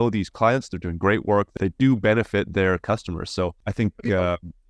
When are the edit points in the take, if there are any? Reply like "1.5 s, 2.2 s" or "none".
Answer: 1.5 s, 3.6 s